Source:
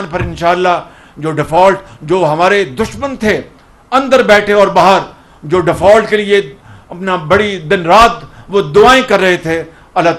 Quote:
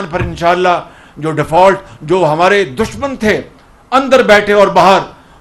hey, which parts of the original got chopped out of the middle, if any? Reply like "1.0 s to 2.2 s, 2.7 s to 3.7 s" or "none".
none